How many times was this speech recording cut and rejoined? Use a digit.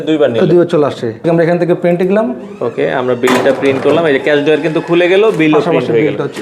1